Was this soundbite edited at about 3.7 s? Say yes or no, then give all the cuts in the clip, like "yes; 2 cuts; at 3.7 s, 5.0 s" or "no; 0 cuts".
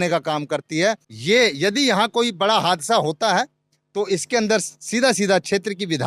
no; 1 cut; at 1.1 s